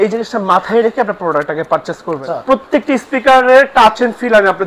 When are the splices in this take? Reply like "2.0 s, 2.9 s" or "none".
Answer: 2.2 s